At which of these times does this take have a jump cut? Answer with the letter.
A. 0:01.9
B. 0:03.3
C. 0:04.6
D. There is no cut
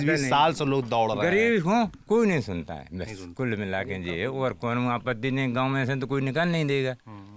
D